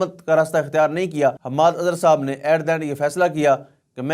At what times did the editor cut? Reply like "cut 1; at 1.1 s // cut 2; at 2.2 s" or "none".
cut 1; at 1.4 s